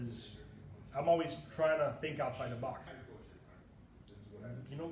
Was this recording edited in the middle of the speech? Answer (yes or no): yes